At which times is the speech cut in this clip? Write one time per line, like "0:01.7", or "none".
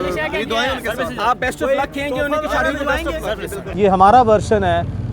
0:03.6